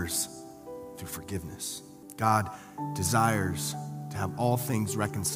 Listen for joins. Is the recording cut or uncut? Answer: cut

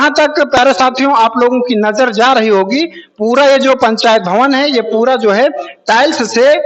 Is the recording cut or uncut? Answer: uncut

